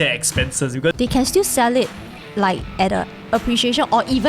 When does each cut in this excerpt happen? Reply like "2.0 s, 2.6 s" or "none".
0.9 s